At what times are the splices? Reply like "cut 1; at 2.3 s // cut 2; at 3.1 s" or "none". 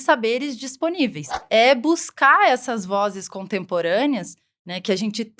cut 1; at 1.3 s